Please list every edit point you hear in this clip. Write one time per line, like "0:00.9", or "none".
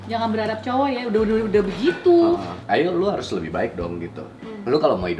0:02.5